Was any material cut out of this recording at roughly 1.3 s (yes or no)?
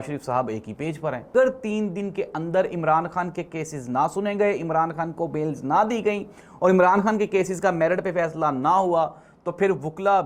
yes